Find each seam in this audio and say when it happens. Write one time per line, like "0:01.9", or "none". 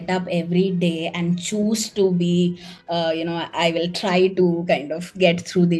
none